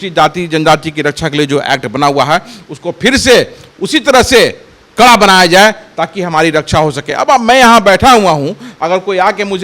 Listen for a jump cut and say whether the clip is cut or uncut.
uncut